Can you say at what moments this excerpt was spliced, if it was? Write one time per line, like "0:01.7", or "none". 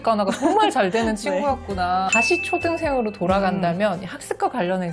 0:02.1